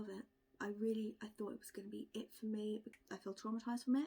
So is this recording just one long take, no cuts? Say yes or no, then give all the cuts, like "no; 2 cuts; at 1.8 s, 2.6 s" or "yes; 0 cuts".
no; 1 cut; at 2.9 s